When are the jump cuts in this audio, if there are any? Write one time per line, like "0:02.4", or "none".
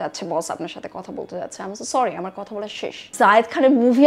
0:03.1

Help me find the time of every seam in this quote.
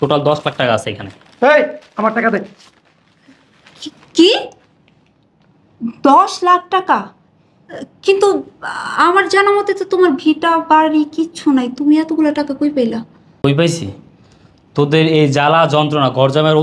none

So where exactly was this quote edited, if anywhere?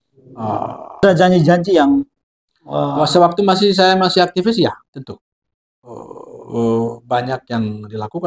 0:01.0

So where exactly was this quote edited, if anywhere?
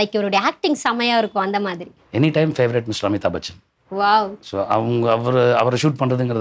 none

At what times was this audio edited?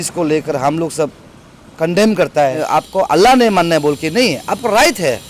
0:02.6

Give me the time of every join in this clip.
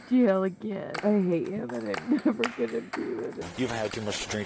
0:03.4

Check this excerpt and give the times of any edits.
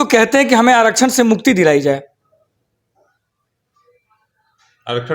none

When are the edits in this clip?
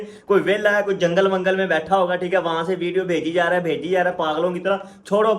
0:04.1

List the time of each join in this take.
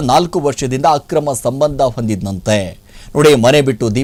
none

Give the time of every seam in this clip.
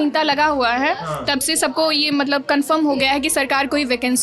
none

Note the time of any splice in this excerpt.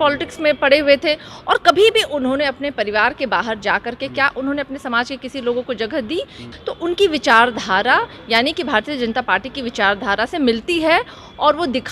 0:06.5

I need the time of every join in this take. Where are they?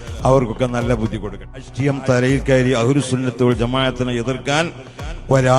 0:01.7

